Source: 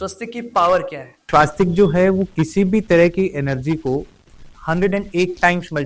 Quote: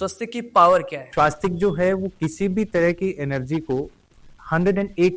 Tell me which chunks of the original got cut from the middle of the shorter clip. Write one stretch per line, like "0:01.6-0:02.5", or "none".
0:01.0-0:01.1